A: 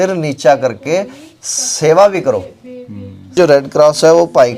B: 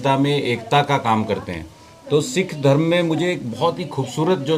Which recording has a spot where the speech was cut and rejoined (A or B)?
A